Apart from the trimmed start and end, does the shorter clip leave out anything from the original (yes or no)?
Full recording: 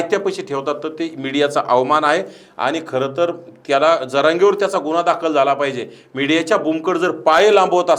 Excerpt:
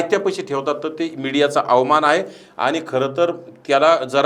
no